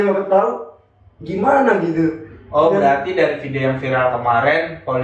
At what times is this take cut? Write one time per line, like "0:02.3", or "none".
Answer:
none